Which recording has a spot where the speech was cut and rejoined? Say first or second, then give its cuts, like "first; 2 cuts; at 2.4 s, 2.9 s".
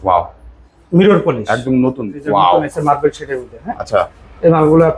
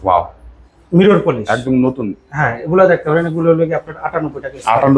first; 1 cut; at 2.1 s